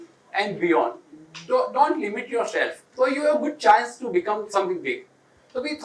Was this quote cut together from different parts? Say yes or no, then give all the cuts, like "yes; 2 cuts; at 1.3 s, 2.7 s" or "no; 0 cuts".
yes; 1 cut; at 2.8 s